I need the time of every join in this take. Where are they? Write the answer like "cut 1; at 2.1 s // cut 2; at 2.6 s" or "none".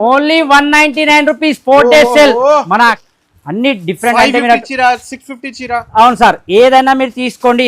cut 1; at 3.1 s